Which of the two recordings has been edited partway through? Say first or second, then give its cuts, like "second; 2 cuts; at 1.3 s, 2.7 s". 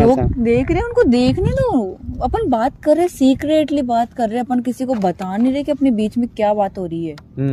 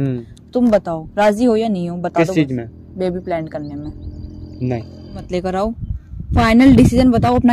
second; 1 cut; at 5.2 s